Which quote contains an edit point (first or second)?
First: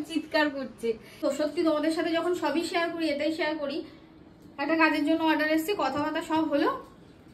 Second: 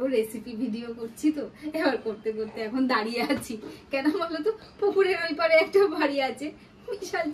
first